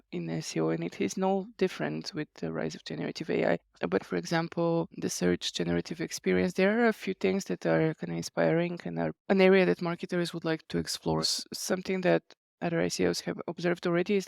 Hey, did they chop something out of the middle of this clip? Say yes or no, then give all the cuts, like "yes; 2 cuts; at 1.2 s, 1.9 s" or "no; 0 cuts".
yes; 5 cuts; at 2.3 s, 4.0 s, 4.9 s, 9.2 s, 11.0 s